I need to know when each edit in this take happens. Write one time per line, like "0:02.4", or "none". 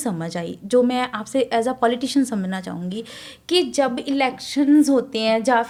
none